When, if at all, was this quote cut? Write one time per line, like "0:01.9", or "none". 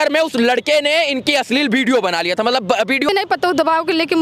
0:03.1